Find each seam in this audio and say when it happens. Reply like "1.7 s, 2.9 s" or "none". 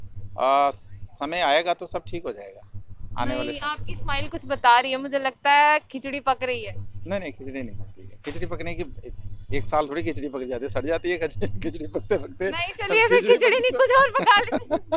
none